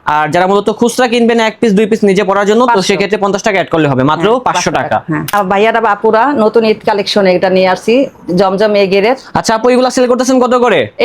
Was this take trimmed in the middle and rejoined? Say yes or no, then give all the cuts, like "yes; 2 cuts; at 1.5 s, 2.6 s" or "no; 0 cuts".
yes; 1 cut; at 5.2 s